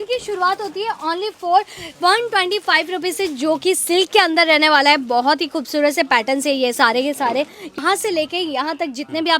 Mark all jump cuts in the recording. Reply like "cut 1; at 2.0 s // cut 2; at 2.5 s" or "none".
cut 1; at 7.8 s